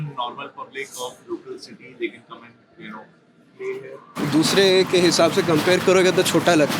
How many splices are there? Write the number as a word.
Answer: one